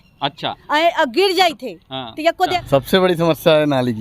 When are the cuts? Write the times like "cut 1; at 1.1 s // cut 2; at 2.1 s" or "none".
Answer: cut 1; at 2.4 s